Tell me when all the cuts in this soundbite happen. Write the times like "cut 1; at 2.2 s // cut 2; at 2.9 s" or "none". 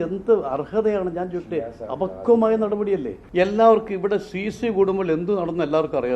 cut 1; at 3.2 s